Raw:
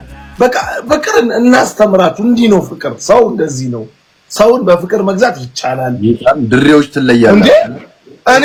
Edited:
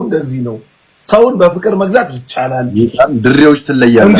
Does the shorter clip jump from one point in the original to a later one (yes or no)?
no